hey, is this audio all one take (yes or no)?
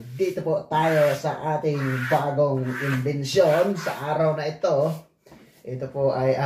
yes